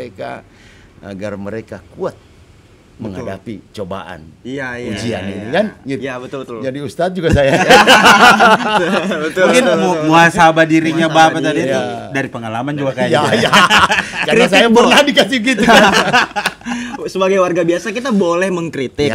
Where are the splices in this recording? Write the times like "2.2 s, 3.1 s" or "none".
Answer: none